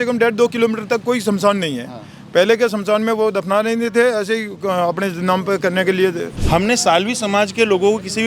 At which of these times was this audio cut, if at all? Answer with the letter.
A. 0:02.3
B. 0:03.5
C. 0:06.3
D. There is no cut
C